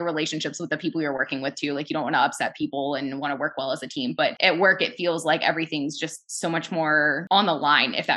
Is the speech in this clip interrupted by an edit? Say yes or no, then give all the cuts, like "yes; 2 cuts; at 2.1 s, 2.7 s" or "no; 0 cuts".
yes; 2 cuts; at 4.4 s, 7.2 s